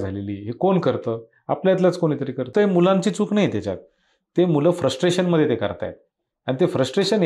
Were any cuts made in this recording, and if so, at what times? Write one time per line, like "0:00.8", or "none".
0:02.5